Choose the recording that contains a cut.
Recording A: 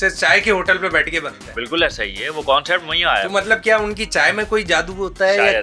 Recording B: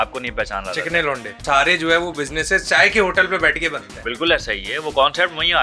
B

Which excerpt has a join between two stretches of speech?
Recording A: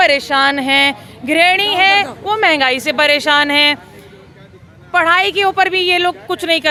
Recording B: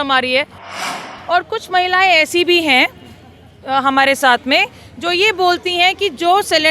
B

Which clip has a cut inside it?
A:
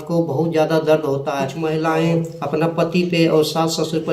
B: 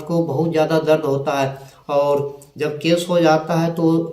A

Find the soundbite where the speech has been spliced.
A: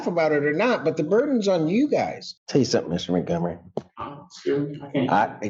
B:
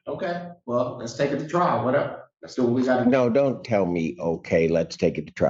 A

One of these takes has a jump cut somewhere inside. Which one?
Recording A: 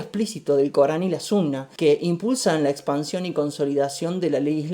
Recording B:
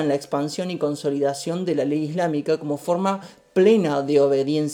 A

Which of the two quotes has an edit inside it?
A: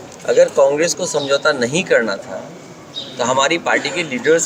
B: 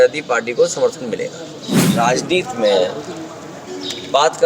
B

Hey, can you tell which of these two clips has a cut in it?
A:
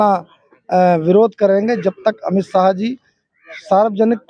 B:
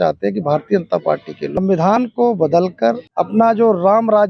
B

